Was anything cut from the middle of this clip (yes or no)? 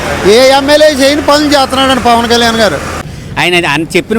yes